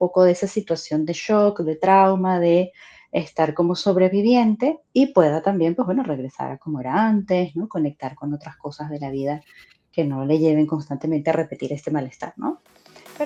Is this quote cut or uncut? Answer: uncut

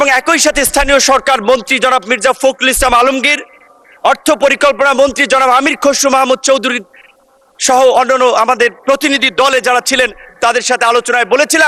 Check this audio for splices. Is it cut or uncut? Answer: uncut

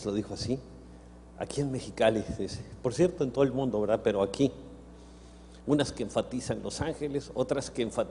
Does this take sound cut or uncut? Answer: cut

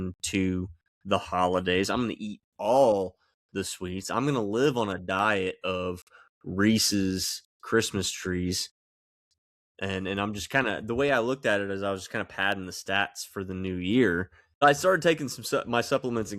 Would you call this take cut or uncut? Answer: cut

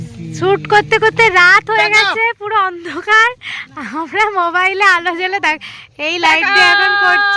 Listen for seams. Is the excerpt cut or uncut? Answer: uncut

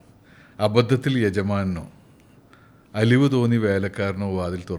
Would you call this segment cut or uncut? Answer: uncut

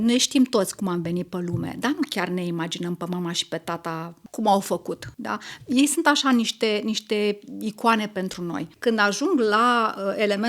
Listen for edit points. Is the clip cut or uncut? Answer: cut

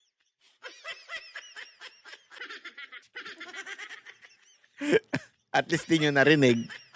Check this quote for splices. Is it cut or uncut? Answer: uncut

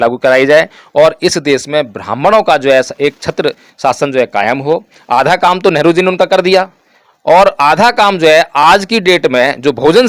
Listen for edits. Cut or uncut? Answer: cut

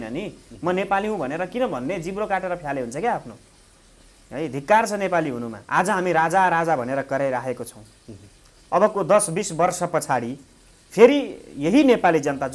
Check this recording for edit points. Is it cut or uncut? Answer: cut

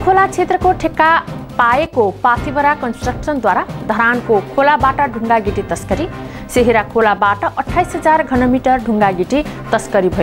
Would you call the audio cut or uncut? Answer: uncut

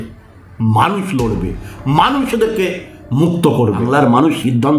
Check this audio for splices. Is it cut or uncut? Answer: cut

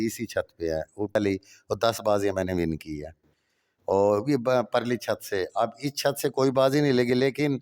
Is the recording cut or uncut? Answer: cut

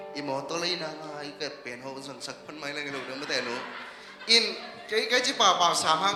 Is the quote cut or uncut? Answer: uncut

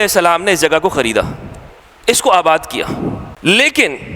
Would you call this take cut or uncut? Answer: cut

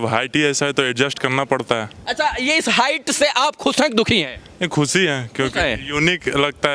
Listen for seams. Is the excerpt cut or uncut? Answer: uncut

